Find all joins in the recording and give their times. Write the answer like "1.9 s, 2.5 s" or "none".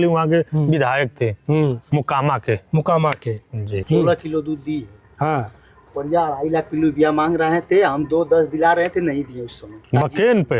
3.8 s